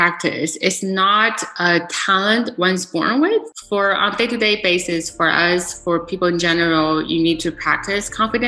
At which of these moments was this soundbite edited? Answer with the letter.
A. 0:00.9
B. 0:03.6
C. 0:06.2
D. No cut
B